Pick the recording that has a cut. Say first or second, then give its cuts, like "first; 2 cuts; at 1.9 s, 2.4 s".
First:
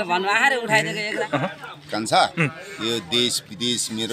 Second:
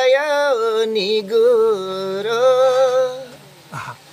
first; 1 cut; at 1.1 s